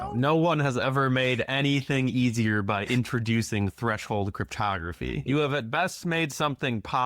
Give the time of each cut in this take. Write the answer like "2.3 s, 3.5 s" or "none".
5.3 s